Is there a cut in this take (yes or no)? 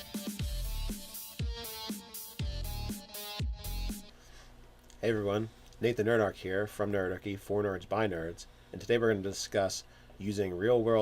yes